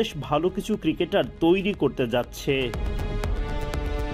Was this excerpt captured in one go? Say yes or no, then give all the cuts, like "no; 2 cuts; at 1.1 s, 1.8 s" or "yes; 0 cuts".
no; 1 cut; at 2.9 s